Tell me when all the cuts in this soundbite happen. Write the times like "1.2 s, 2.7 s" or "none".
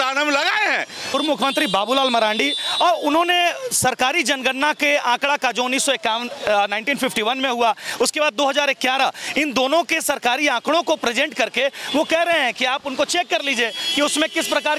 1.1 s